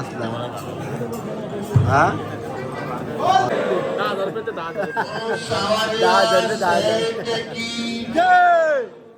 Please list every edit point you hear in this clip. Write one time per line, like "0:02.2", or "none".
0:03.5